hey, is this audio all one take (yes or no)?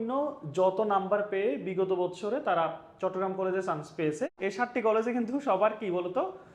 no